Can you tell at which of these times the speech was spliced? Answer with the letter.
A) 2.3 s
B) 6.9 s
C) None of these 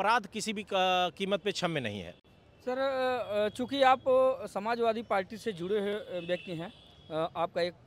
C